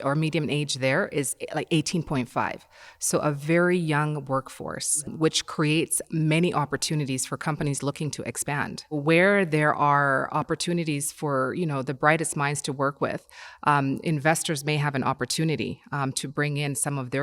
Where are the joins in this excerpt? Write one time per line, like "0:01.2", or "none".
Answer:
0:05.1
0:09.0